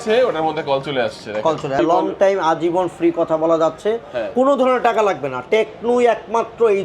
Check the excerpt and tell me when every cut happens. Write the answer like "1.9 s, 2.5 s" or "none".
1.8 s